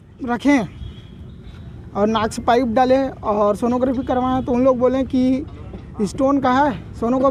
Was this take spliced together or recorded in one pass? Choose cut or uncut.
uncut